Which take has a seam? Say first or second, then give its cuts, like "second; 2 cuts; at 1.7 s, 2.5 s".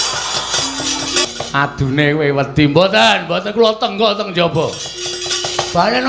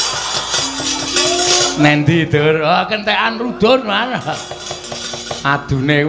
first; 1 cut; at 1.2 s